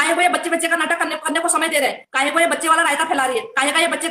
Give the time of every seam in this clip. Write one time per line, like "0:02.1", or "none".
none